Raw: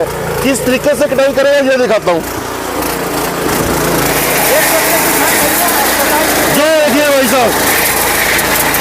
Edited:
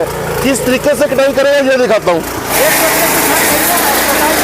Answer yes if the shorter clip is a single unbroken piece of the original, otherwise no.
no